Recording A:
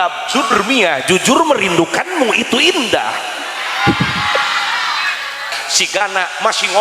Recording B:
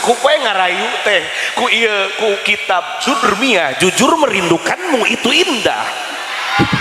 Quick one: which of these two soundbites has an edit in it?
A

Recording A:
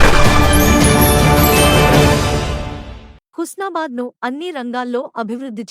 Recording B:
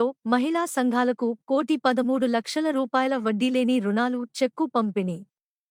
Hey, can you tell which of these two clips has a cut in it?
A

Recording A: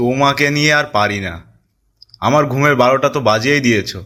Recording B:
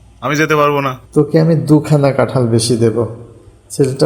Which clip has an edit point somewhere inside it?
B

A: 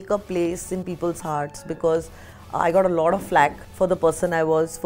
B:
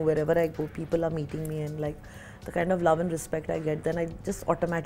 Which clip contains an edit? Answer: A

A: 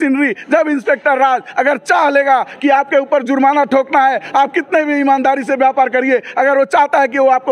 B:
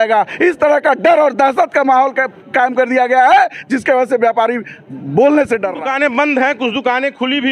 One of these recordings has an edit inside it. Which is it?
B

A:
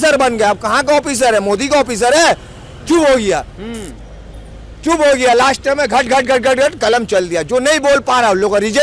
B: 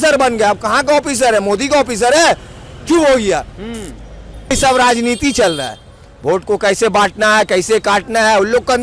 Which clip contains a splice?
B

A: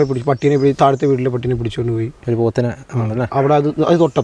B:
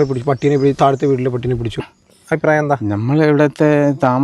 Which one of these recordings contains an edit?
B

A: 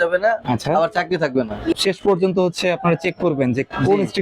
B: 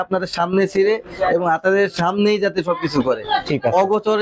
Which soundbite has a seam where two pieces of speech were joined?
A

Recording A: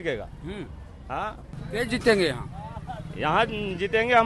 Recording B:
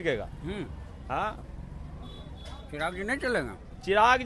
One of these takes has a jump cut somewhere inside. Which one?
A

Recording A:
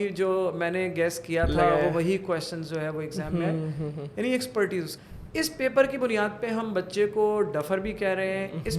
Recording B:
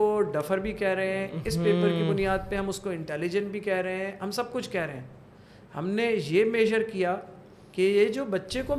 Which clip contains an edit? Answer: A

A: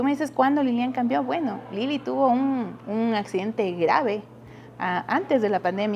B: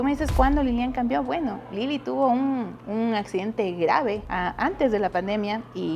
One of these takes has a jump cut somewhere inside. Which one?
B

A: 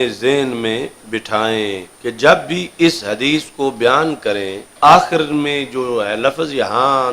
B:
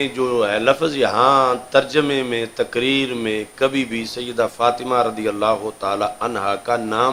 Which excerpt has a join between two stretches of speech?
A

